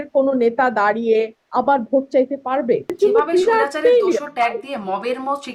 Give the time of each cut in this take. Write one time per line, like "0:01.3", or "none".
0:02.9